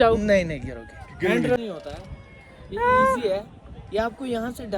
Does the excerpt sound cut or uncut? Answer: cut